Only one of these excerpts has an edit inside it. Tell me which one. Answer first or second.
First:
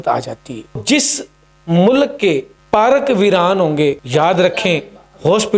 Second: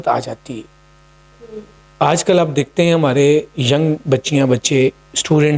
first